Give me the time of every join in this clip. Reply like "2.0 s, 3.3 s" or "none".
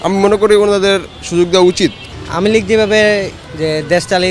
2.0 s, 3.4 s